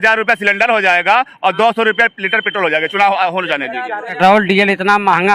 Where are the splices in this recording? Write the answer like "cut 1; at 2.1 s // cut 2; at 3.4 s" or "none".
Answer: cut 1; at 4.2 s